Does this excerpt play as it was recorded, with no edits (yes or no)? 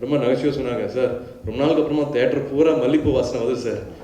yes